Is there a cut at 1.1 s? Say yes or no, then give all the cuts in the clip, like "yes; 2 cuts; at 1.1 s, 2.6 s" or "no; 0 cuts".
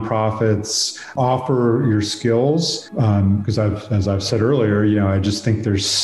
yes; 1 cut; at 1.1 s